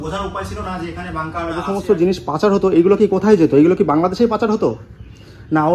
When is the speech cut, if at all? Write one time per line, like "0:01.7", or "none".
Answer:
0:01.6

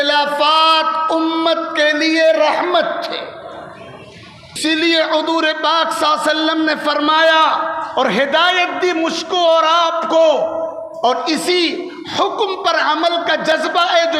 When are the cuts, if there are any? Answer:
0:04.6

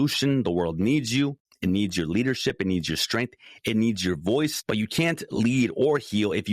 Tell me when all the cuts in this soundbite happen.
0:01.5
0:04.6

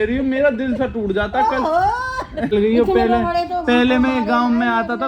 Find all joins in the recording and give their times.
0:02.5

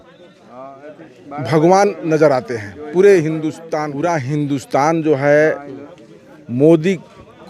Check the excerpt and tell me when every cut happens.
0:03.7

